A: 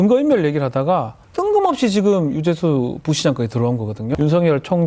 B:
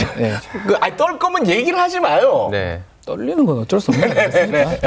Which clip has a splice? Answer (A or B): A